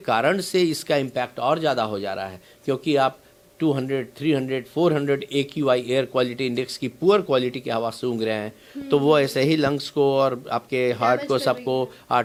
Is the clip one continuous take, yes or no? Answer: yes